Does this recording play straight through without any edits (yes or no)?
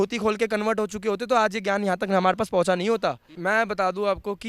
no